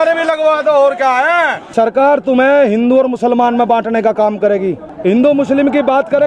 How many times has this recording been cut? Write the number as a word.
two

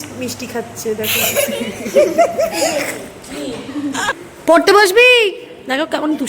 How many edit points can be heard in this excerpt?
one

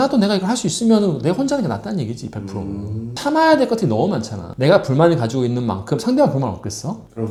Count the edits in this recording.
zero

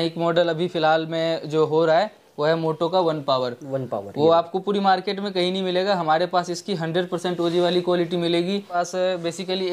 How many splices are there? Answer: one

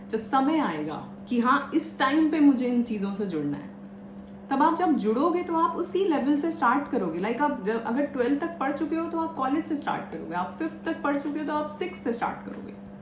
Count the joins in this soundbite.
zero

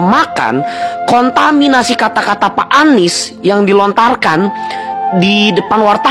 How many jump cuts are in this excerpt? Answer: zero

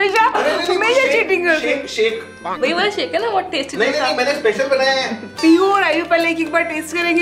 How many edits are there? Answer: one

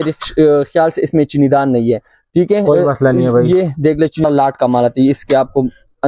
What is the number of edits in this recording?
one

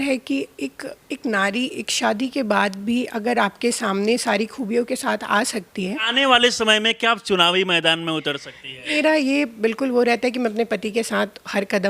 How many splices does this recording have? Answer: two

